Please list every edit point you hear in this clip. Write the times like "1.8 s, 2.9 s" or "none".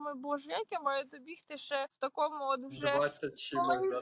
1.9 s